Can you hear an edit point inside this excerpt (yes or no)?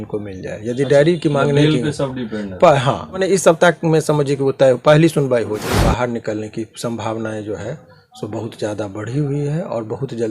yes